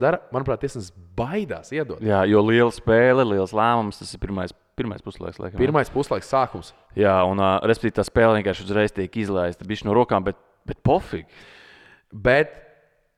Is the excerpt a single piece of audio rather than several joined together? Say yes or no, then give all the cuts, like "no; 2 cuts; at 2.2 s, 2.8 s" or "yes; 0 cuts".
yes; 0 cuts